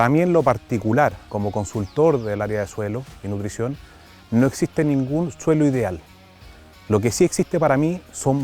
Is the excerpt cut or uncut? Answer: cut